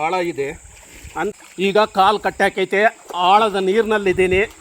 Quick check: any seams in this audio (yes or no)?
yes